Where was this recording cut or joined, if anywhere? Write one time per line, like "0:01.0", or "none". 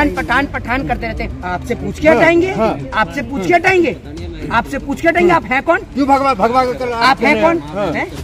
0:01.3